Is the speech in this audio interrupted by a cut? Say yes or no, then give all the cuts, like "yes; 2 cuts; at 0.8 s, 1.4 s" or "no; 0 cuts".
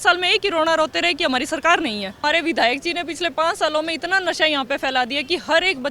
yes; 1 cut; at 2.2 s